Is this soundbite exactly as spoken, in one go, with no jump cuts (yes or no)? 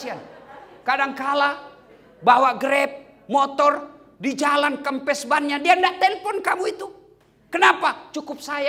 yes